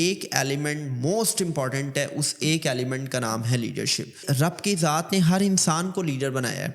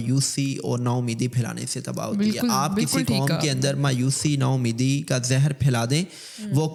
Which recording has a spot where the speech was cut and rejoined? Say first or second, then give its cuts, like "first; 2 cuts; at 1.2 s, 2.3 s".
first; 1 cut; at 4.2 s